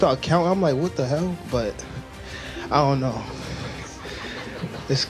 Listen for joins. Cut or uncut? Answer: uncut